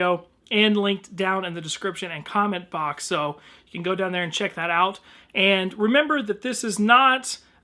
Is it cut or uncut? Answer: cut